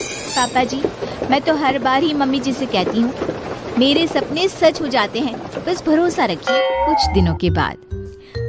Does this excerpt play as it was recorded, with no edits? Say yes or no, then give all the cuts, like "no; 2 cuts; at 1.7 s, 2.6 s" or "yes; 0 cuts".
no; 1 cut; at 6.9 s